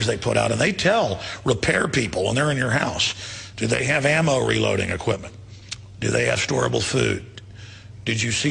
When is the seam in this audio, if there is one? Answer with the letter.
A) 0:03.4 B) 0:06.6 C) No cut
B